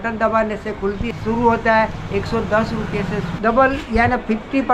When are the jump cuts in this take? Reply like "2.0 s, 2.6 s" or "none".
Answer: 1.1 s, 3.3 s